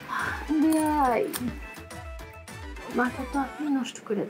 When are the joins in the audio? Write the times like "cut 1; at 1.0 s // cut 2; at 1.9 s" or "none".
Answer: none